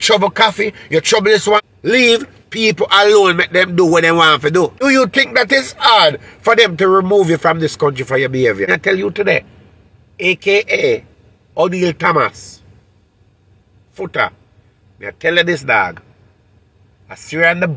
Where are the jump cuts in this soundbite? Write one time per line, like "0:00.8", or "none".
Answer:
0:01.7
0:04.8
0:08.7